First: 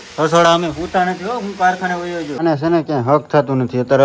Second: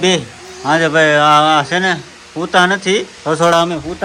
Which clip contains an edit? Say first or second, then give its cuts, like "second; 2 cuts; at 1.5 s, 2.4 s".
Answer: first; 1 cut; at 2.3 s